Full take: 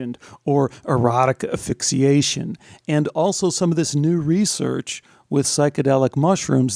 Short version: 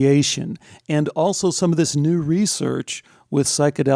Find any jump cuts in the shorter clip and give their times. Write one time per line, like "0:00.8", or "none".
none